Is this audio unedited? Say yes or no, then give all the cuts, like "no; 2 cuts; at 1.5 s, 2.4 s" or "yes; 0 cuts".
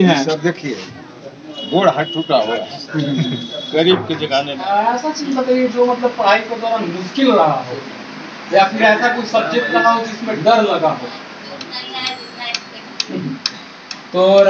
no; 2 cuts; at 4.5 s, 11.7 s